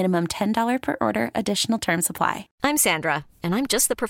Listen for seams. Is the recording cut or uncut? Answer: cut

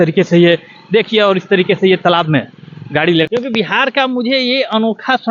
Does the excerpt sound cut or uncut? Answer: cut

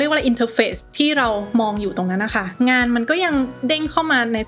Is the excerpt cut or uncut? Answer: uncut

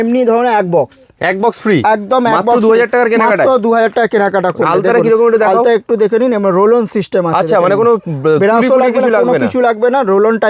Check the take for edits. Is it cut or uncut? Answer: uncut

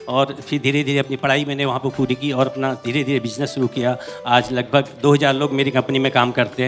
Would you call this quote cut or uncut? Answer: uncut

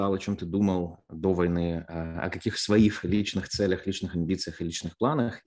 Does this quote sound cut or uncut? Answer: uncut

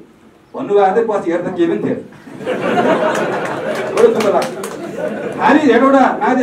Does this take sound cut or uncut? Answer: uncut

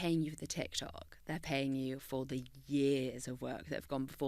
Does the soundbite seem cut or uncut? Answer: uncut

